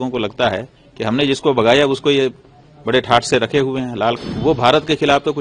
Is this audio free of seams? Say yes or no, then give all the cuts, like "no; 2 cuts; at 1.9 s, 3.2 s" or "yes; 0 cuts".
no; 1 cut; at 4.2 s